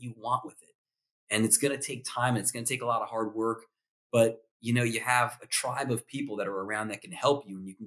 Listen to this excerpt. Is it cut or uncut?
uncut